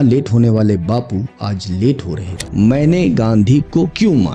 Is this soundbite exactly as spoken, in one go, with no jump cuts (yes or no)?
no